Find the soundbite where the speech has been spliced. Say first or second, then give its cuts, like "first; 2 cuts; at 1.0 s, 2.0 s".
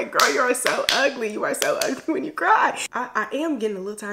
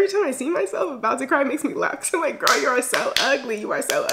first; 1 cut; at 2.9 s